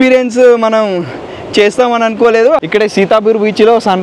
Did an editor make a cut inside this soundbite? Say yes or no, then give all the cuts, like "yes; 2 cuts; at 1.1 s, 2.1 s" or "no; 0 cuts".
yes; 1 cut; at 2.6 s